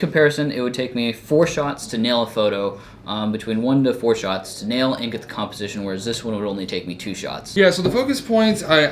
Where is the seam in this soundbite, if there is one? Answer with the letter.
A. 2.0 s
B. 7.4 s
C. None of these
B